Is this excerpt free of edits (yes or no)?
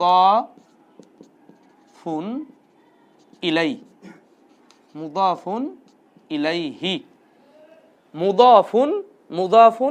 yes